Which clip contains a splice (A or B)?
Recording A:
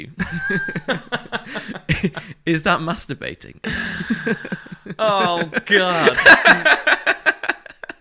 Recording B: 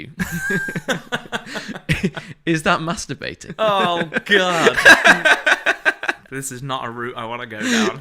B